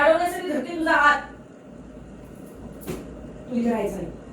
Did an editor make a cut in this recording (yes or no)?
no